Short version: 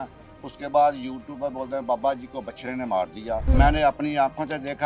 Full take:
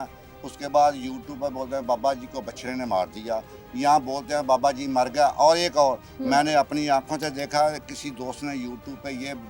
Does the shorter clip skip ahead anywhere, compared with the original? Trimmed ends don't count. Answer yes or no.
yes